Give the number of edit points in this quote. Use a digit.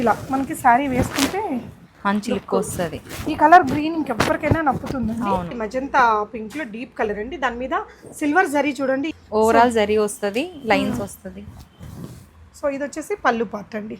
2